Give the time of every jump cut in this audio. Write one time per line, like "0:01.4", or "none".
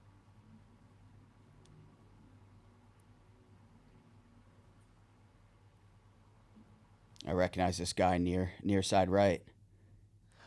none